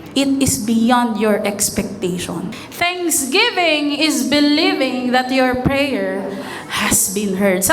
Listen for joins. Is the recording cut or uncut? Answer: cut